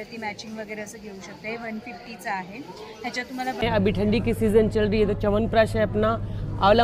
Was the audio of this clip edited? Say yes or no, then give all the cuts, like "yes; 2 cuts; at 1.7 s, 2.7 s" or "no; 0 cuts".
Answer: yes; 1 cut; at 3.6 s